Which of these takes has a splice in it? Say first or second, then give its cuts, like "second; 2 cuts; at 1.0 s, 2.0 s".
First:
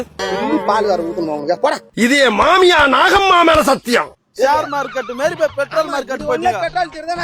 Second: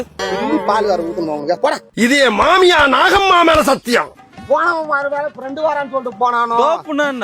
second; 1 cut; at 4.2 s